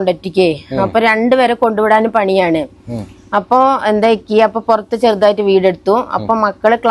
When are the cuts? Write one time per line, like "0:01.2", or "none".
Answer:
none